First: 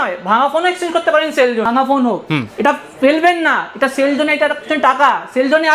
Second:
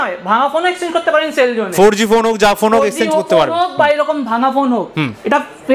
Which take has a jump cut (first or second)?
first